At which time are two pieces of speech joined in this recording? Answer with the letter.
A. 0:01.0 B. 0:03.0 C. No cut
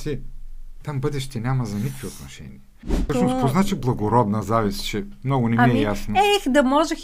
B